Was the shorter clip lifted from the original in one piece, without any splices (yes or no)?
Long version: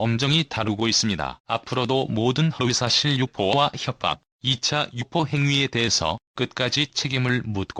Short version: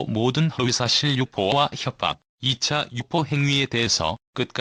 yes